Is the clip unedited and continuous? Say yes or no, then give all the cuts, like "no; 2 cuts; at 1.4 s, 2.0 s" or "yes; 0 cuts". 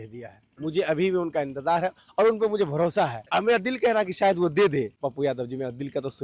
no; 2 cuts; at 3.2 s, 5.0 s